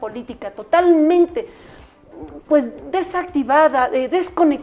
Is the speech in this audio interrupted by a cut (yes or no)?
no